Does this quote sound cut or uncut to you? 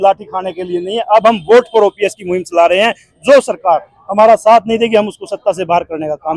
uncut